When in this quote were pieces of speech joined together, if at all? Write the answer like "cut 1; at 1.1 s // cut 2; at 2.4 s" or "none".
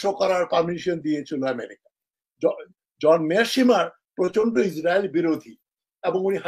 none